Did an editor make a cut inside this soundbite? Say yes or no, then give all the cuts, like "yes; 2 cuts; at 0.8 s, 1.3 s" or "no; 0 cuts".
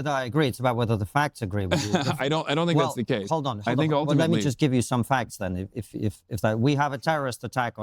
no; 0 cuts